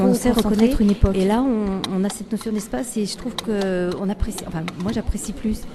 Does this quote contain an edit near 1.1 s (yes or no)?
yes